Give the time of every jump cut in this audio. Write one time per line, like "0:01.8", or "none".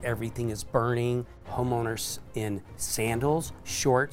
0:01.4